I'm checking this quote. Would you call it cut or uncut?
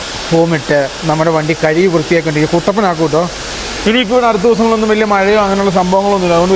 uncut